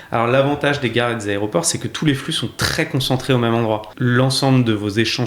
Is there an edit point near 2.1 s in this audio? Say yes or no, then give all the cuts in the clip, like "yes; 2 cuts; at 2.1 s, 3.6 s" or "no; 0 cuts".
no; 1 cut; at 3.9 s